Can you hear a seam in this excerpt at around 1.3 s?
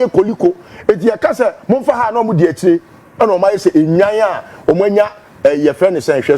no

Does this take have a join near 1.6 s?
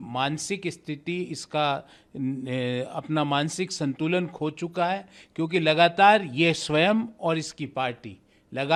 no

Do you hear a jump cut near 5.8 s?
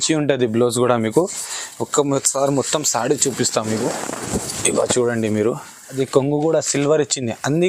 yes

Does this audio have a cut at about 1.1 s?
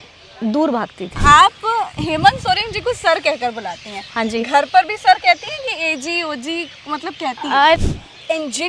yes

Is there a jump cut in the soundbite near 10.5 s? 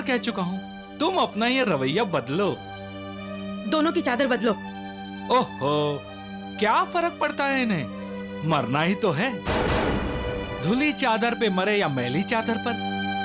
yes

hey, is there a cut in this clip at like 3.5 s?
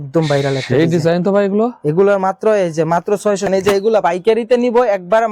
yes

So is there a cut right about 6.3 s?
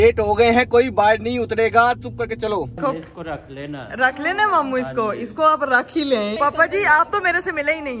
yes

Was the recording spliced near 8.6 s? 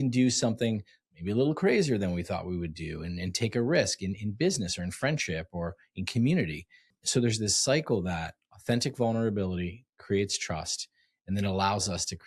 no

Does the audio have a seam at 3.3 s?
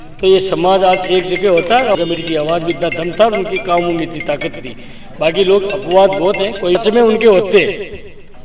no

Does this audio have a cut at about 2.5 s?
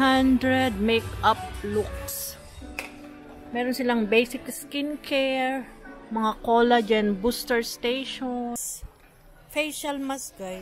no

